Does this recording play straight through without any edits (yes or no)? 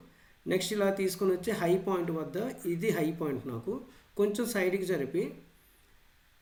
yes